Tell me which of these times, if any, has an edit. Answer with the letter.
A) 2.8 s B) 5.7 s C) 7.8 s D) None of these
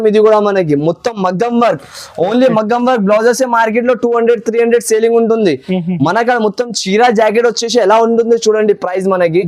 D